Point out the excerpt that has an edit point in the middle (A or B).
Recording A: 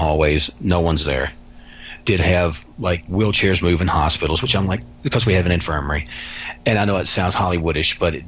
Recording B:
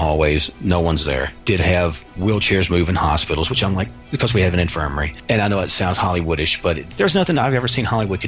B